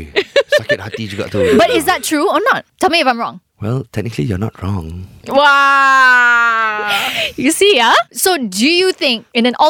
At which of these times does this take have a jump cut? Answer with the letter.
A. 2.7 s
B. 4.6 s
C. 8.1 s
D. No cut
D